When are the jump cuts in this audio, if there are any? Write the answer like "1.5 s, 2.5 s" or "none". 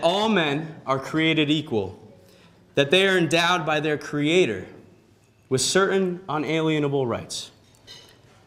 none